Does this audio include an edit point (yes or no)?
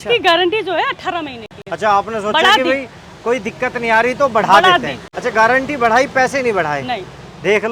no